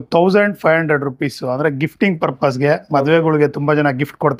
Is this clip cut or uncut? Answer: uncut